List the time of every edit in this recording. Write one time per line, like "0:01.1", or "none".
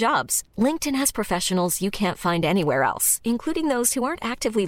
none